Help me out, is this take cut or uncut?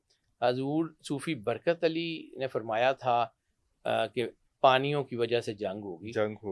uncut